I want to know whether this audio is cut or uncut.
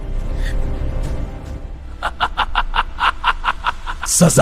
cut